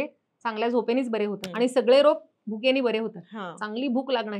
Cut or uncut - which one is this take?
cut